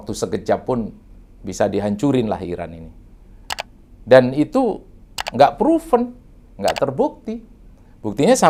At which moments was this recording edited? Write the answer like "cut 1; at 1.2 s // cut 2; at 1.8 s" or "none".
none

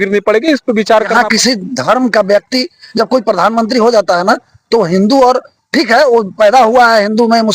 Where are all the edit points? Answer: cut 1; at 1.1 s

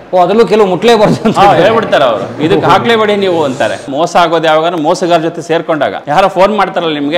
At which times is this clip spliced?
cut 1; at 3.9 s // cut 2; at 6.0 s

